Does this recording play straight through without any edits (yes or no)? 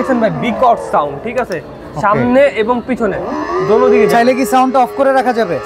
yes